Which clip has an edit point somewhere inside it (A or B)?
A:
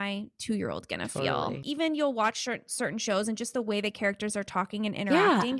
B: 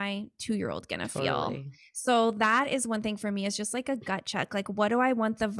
A